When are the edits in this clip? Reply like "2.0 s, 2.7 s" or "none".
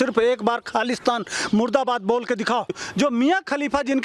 2.8 s